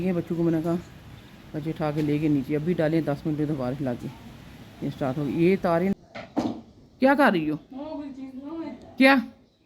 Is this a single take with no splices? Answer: no; 1 cut; at 5.9 s

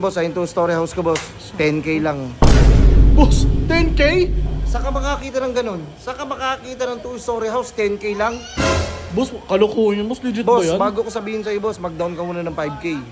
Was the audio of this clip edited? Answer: no; 0 cuts

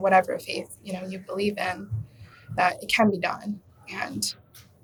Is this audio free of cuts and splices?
yes; 0 cuts

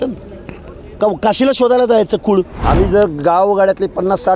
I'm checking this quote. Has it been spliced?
yes; 1 cut; at 2.6 s

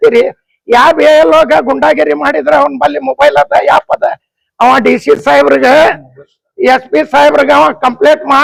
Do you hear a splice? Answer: no; 0 cuts

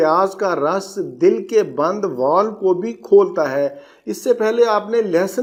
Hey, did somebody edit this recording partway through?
no; 0 cuts

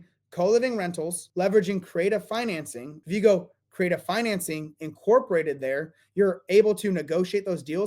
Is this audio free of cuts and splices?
no; 2 cuts; at 1.2 s, 2.9 s

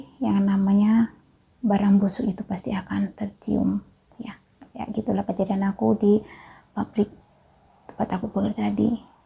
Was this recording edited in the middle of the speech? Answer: no; 0 cuts

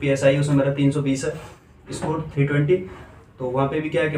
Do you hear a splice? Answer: no; 0 cuts

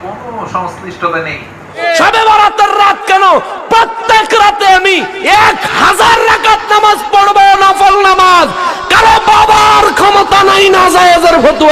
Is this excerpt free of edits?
no; 1 cut; at 1.7 s

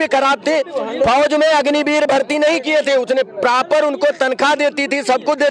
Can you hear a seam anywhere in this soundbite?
no; 0 cuts

